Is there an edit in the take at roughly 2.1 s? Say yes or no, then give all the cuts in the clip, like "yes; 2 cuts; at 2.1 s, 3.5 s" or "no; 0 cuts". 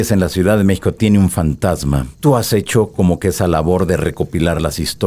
yes; 1 cut; at 2.1 s